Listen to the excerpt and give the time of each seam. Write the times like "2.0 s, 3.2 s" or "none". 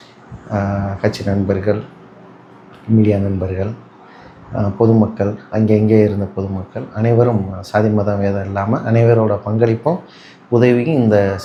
none